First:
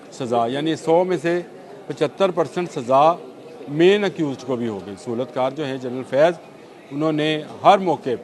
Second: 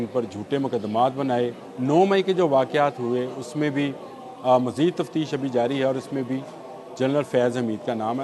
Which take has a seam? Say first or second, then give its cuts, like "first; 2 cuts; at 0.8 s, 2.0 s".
second; 1 cut; at 1.6 s